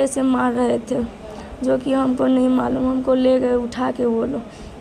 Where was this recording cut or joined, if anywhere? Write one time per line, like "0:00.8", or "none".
none

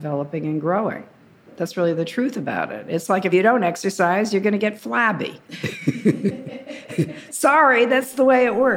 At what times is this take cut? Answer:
0:01.6
0:03.3

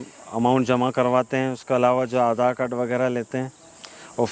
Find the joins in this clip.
none

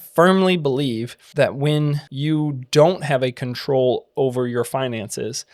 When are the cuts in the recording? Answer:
0:01.2
0:02.1

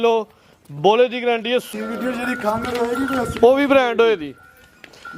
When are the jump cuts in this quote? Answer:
0:01.7

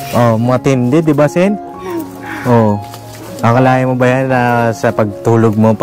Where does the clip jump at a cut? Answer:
none

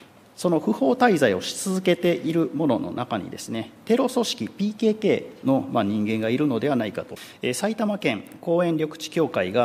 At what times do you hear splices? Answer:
0:07.2

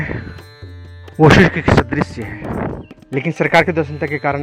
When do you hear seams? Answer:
0:02.9

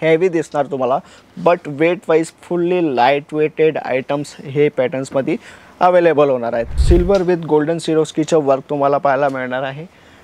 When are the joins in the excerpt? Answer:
0:06.7

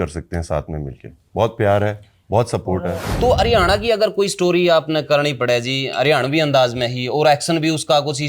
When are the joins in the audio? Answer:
0:03.0

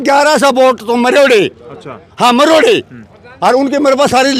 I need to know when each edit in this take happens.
none

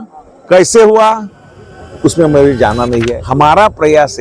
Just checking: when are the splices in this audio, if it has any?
0:03.1

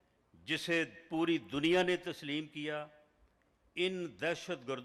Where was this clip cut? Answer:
none

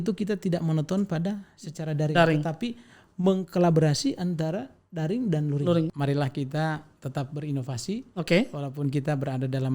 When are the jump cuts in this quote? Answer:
0:05.9

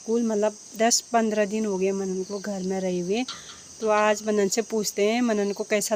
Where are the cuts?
none

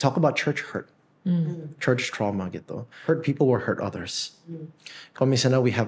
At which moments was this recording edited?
0:03.0

